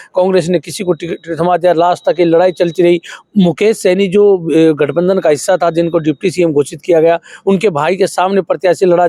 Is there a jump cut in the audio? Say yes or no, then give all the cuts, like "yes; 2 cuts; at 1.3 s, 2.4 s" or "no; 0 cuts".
no; 0 cuts